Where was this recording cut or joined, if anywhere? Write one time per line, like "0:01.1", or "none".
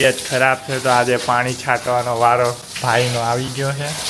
none